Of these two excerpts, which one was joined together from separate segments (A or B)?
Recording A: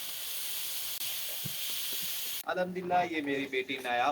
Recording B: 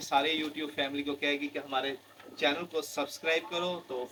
A